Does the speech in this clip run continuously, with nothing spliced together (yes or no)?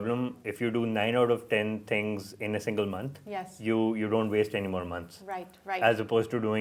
yes